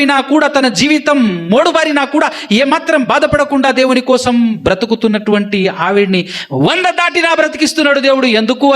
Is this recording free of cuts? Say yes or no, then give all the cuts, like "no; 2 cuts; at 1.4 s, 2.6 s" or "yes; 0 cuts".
yes; 0 cuts